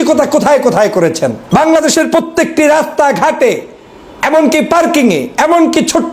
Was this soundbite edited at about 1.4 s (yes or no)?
yes